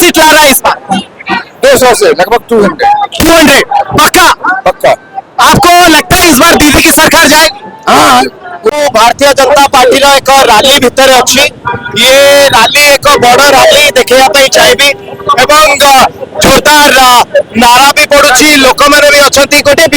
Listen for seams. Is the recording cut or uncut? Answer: cut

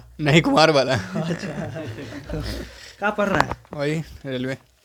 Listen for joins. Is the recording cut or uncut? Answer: uncut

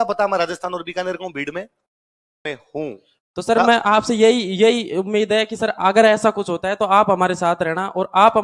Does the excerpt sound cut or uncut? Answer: cut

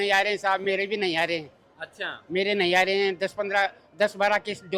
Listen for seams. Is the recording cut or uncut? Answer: uncut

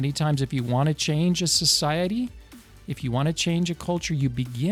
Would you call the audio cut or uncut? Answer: uncut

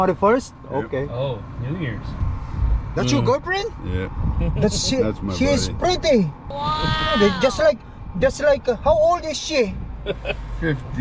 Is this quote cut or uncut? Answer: cut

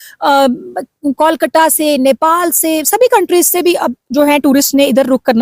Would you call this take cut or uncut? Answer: uncut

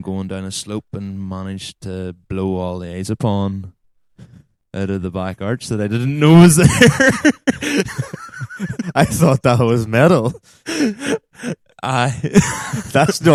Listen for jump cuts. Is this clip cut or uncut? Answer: uncut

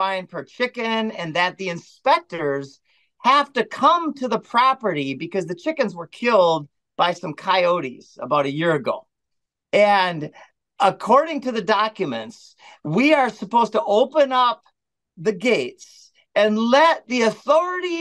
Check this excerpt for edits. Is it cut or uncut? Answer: uncut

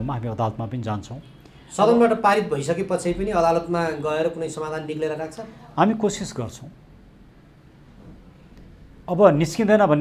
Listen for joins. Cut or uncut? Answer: uncut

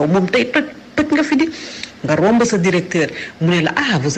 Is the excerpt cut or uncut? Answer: uncut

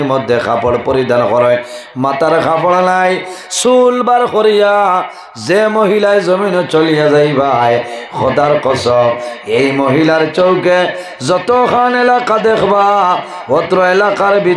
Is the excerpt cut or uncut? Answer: uncut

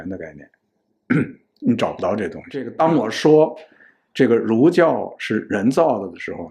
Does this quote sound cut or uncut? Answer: cut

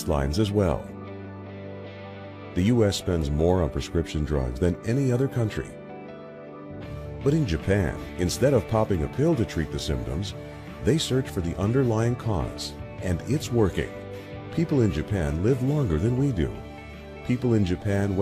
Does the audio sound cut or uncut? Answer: cut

